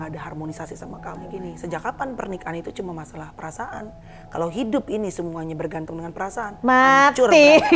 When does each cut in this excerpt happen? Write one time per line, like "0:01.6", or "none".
0:01.3